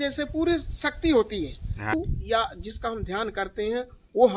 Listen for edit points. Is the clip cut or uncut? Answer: cut